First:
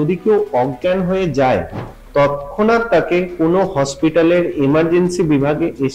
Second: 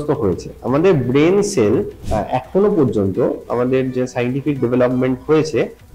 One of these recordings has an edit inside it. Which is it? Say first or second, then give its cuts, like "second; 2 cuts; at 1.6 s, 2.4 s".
second; 1 cut; at 2.0 s